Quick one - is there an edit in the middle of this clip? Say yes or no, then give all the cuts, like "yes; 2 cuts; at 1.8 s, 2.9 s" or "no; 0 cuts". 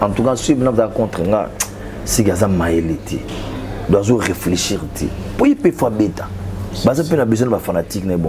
no; 0 cuts